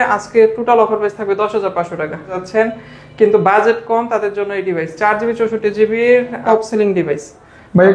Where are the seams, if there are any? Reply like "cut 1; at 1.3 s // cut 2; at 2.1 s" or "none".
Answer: cut 1; at 2.3 s // cut 2; at 6.4 s